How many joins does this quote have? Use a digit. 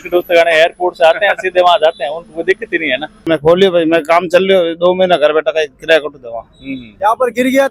2